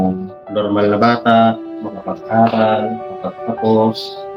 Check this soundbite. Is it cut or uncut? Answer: uncut